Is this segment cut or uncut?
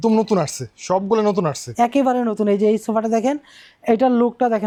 uncut